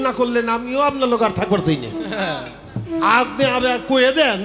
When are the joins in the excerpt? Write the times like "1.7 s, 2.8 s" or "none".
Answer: none